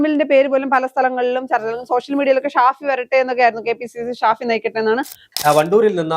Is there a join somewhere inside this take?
yes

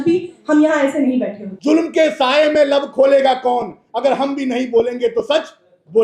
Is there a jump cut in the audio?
yes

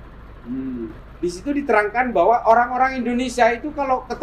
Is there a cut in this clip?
yes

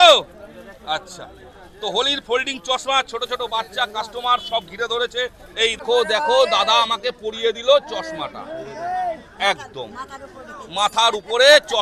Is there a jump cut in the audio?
yes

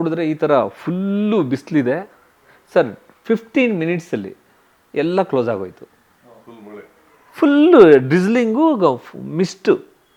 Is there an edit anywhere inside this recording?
no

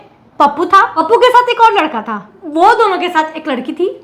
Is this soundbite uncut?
no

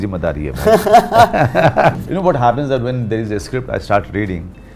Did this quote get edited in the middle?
yes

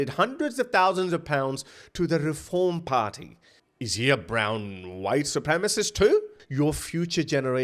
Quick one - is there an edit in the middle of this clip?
yes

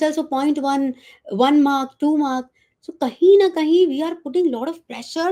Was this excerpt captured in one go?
yes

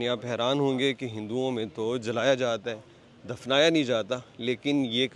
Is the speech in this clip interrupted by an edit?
no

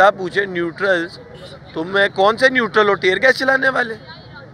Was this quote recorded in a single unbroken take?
yes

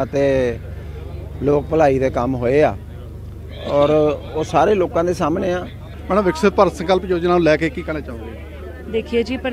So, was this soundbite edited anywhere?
yes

